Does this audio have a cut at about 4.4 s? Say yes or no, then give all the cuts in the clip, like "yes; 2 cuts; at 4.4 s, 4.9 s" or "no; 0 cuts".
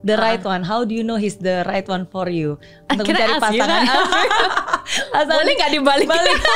yes; 1 cut; at 4.4 s